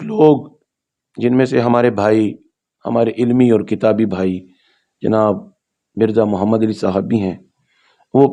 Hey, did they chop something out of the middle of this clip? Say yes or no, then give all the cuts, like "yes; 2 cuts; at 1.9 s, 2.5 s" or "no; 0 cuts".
no; 0 cuts